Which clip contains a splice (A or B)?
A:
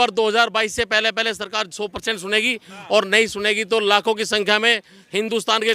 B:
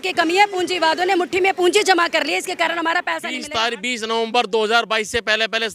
B